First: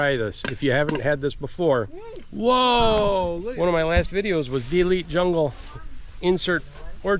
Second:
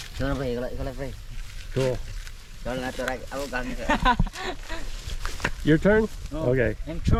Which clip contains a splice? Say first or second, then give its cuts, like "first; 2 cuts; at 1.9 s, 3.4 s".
first; 1 cut; at 3.4 s